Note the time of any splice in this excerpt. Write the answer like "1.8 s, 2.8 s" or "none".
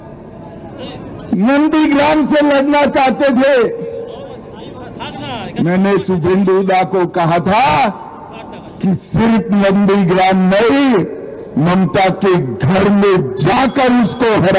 none